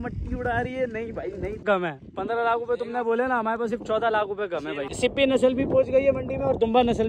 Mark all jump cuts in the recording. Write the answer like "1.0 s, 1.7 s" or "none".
1.6 s, 4.9 s